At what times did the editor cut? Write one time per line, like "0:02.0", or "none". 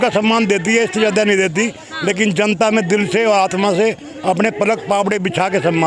none